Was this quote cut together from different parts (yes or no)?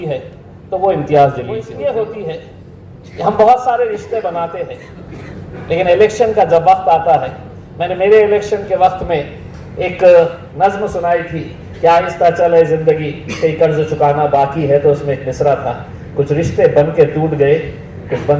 yes